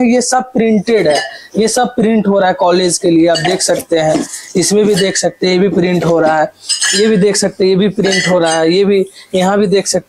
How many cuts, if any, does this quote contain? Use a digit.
0